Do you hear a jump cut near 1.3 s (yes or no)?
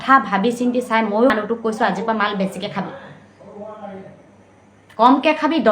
yes